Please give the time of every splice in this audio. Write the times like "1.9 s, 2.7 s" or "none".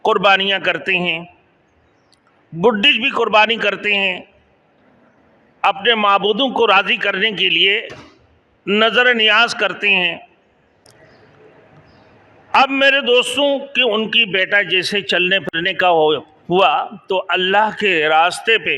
10.8 s